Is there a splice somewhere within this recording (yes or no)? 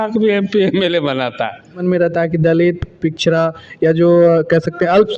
no